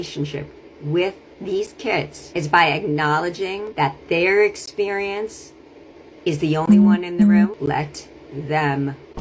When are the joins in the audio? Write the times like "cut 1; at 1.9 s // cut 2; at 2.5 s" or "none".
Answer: cut 1; at 2.2 s // cut 2; at 3.6 s // cut 3; at 7.6 s